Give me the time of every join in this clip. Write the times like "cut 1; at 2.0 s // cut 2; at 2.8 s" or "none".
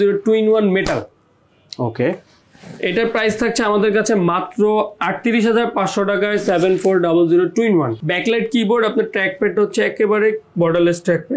cut 1; at 8.0 s